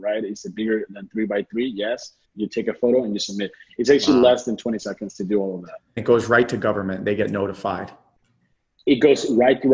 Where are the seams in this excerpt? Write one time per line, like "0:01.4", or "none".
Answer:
0:02.3
0:06.0